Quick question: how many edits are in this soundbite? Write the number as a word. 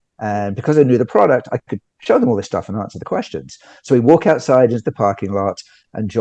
zero